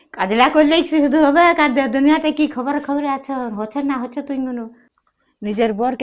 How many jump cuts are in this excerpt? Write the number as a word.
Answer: one